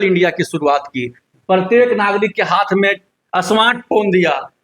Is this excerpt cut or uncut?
uncut